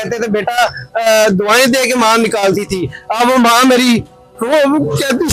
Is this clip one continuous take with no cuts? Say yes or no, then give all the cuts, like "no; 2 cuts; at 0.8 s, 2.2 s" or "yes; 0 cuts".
yes; 0 cuts